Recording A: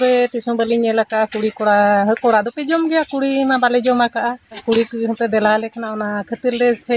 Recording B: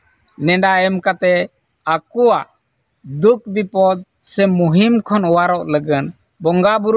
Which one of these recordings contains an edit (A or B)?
A